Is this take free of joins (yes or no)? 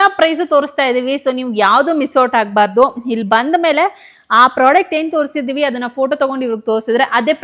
yes